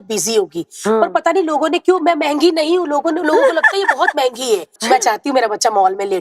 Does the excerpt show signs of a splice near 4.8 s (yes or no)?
yes